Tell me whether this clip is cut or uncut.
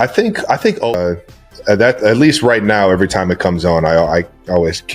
cut